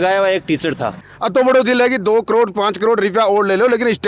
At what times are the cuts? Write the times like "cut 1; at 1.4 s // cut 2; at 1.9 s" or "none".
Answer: cut 1; at 1.0 s